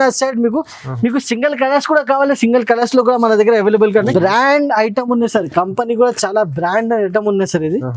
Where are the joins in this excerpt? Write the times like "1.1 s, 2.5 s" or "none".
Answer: 4.1 s